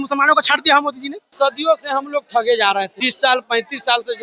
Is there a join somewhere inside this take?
yes; 2 cuts; at 1.2 s, 3.0 s

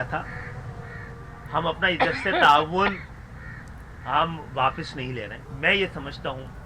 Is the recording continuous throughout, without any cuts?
no; 1 cut; at 5.4 s

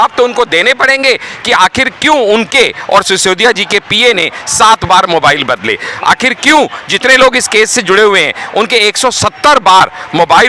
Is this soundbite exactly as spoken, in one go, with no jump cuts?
yes; 0 cuts

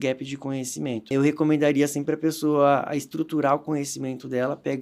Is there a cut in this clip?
yes; 1 cut; at 1.1 s

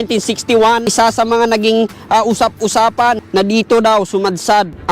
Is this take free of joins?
no; 1 cut; at 0.9 s

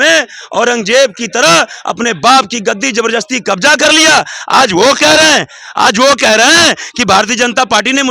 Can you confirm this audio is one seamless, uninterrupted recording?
yes; 0 cuts

